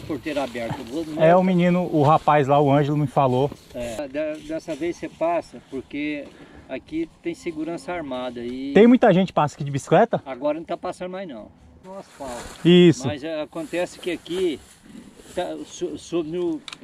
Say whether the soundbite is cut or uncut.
uncut